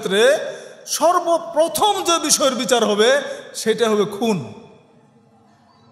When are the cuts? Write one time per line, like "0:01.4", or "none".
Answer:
none

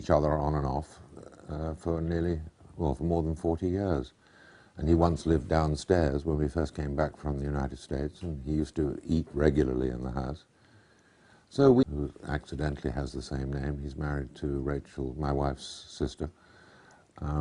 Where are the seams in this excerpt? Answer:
none

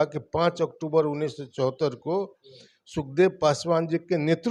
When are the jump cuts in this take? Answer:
none

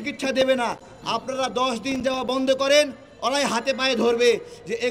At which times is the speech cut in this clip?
none

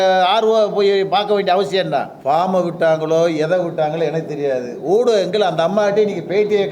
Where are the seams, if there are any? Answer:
0:02.2

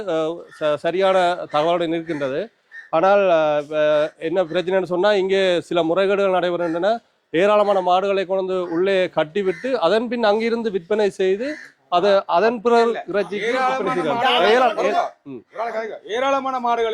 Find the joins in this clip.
none

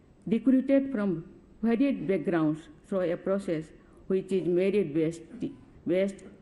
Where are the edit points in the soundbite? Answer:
none

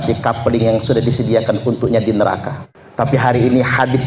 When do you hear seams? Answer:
0:03.2

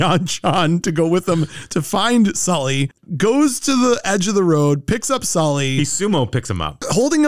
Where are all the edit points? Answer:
0:03.0

